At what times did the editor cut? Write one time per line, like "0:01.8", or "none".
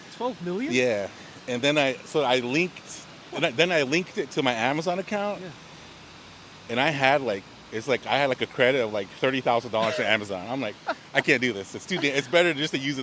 none